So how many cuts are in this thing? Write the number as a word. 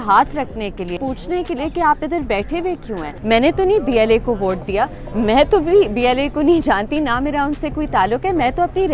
two